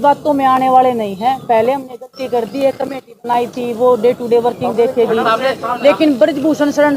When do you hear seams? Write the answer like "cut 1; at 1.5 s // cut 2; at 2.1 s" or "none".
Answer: none